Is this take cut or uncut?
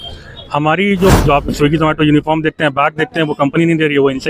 cut